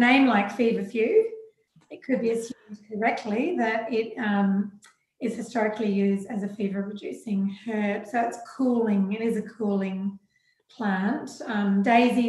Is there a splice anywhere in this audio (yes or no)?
no